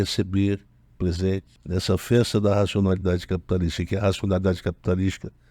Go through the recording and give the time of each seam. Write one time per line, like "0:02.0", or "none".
0:01.5

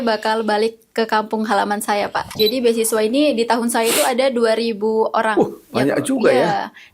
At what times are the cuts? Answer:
0:02.3

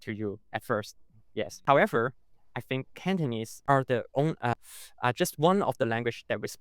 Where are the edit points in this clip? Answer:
0:01.6
0:03.5
0:04.5

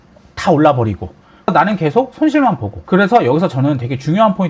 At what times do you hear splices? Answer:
0:01.5
0:02.7

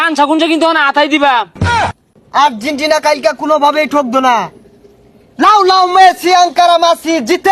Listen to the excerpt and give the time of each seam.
0:01.9

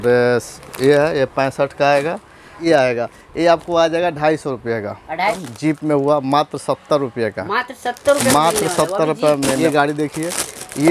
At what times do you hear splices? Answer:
0:02.5
0:05.5
0:09.6

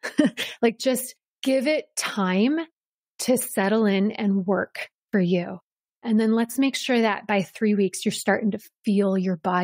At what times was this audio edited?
0:01.4

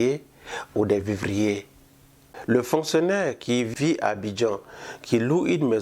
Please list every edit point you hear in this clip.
0:02.3
0:03.7

